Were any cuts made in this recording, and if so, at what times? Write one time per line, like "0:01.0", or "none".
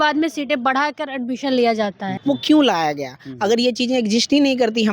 0:02.1